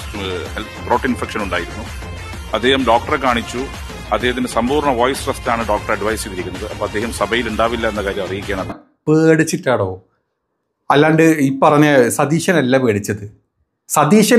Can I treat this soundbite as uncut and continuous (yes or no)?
no